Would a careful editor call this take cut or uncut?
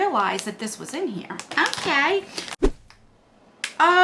cut